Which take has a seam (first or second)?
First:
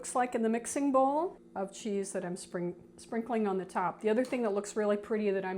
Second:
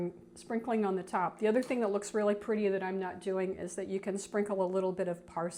first